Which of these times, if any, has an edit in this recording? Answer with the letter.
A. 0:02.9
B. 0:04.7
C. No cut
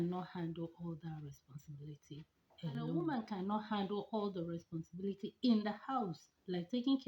A